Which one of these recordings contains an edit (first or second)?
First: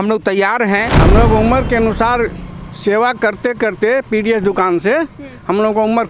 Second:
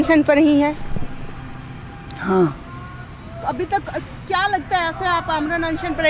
first